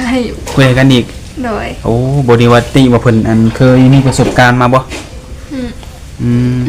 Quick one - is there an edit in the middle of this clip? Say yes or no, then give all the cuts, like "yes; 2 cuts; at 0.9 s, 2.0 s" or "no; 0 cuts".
no; 0 cuts